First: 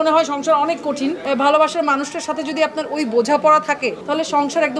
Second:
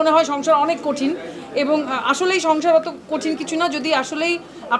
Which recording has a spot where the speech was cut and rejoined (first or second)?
first